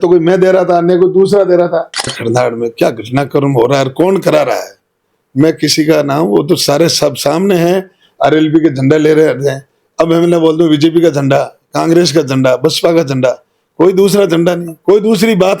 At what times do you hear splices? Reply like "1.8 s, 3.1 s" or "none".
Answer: 2.2 s